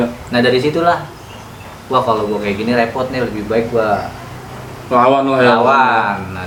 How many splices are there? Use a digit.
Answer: 0